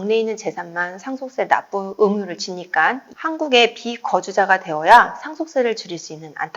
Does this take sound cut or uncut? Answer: cut